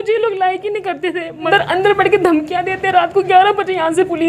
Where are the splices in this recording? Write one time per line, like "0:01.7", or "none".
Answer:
0:01.5